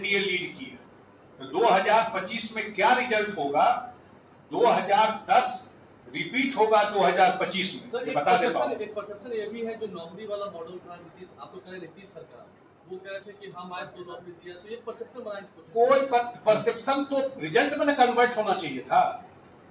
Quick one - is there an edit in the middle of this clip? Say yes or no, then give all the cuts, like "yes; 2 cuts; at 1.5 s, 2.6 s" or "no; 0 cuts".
no; 0 cuts